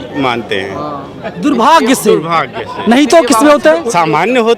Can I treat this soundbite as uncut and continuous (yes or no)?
yes